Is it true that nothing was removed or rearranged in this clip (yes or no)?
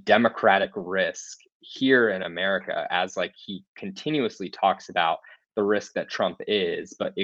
yes